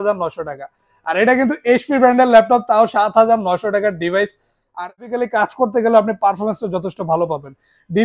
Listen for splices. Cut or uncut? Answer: cut